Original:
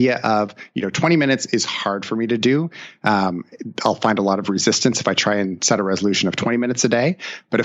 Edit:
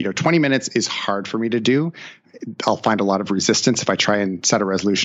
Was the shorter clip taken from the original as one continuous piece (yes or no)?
no